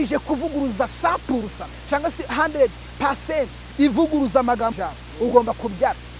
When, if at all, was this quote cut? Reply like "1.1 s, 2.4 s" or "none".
4.7 s